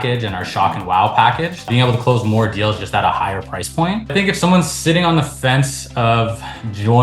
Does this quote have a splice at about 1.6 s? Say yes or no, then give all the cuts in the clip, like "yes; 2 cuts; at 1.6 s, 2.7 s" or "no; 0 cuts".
yes; 2 cuts; at 1.6 s, 4.0 s